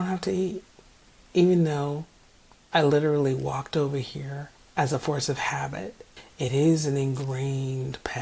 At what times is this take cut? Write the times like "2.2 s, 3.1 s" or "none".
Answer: 6.1 s

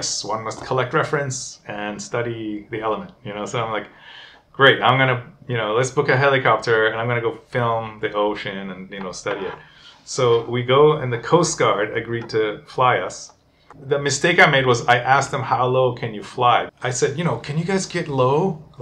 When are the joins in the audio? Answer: 13.7 s, 16.7 s

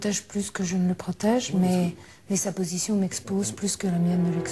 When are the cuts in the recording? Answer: 2.3 s

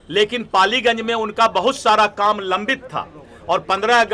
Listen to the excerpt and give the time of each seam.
none

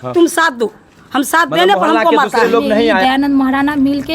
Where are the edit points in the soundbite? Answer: 3.0 s

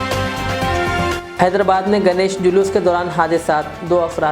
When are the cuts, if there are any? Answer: 1.2 s

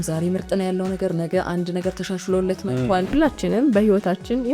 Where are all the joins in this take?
3.1 s

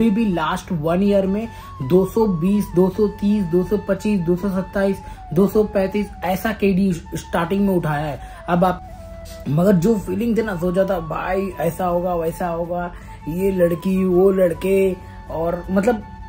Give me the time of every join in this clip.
8.9 s

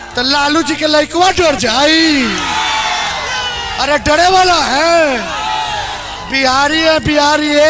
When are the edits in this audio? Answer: none

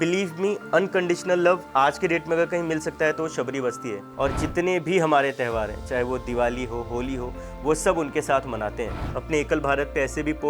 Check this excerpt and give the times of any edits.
4.0 s, 9.1 s

